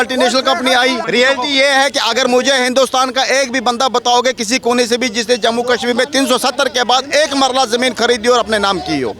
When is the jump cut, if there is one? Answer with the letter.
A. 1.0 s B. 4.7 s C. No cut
A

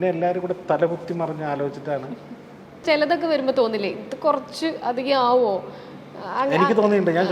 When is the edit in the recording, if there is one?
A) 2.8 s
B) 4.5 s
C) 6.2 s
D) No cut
A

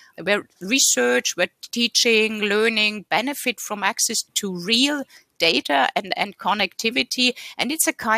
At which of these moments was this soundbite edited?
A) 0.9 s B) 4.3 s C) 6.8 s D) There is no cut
B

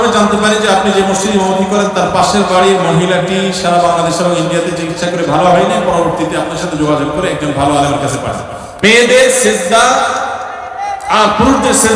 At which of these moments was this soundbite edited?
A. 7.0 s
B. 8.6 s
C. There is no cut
B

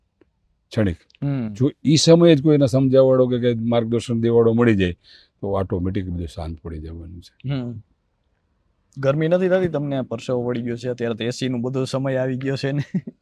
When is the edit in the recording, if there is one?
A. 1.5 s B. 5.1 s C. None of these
C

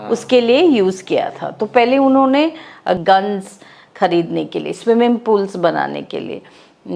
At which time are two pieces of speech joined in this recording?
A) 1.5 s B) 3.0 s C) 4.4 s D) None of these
B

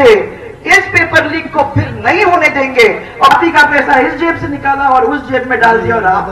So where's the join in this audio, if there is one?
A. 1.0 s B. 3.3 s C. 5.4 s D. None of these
B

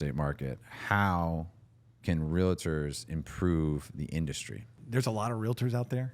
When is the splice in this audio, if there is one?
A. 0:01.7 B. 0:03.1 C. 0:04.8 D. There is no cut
C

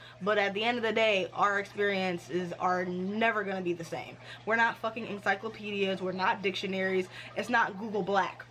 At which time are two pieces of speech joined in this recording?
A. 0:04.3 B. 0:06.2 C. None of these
A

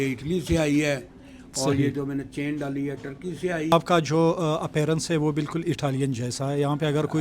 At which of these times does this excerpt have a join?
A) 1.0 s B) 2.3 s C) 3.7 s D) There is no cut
C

